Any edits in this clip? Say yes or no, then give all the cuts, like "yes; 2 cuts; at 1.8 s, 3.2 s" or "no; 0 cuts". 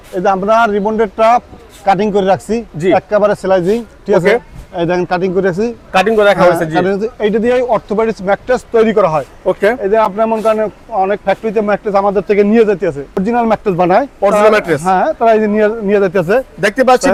no; 0 cuts